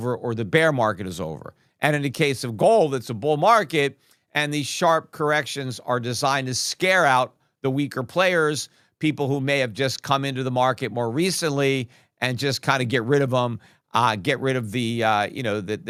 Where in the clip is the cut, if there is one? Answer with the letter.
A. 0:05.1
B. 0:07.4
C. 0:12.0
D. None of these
D